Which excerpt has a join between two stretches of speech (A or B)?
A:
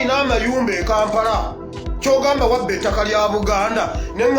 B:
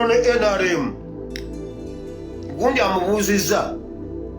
B